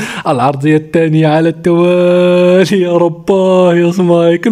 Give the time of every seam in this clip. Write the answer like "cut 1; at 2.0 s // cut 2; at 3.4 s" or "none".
none